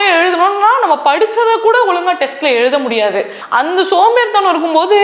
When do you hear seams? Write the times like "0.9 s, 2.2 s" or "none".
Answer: 3.4 s